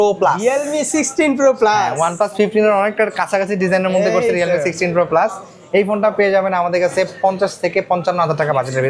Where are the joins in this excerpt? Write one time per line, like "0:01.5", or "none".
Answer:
none